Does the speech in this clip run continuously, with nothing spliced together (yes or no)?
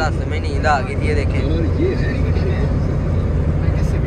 yes